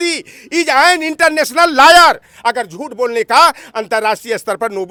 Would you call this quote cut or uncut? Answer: uncut